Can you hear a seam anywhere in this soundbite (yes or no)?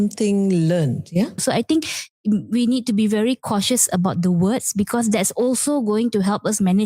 yes